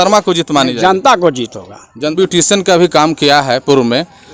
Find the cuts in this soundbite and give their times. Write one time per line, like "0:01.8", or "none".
0:02.1